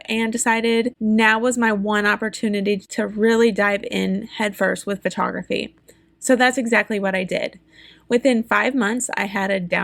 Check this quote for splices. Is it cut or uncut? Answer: cut